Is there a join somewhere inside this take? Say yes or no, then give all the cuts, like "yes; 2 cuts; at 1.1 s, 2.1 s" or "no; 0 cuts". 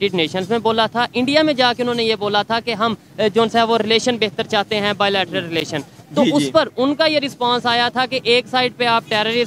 no; 0 cuts